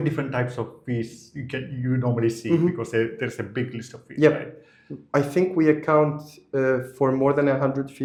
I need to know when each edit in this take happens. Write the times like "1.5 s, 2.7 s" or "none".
none